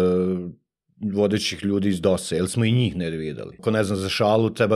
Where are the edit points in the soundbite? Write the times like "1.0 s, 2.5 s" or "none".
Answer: 3.5 s